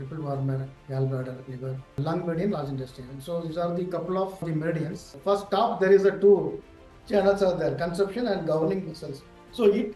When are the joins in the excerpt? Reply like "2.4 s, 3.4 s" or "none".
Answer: 5.2 s